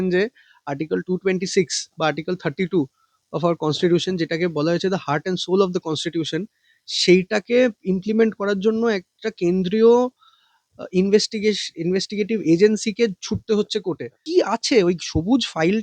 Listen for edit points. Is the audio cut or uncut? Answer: cut